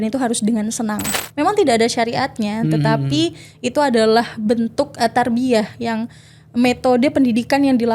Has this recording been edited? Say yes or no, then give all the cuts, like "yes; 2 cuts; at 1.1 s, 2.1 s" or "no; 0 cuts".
yes; 1 cut; at 1.2 s